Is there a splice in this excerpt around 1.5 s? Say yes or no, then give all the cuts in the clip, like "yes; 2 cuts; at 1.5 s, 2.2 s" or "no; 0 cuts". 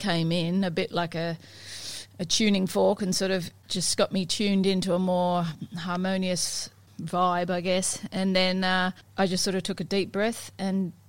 no; 3 cuts; at 3.6 s, 6.9 s, 9.0 s